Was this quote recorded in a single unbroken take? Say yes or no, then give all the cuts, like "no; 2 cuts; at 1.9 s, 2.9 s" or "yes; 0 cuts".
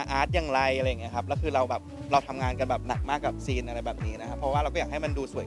yes; 0 cuts